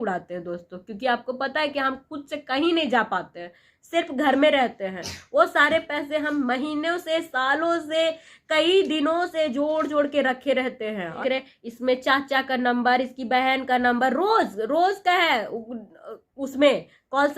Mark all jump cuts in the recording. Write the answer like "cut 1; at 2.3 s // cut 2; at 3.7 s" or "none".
cut 1; at 11.2 s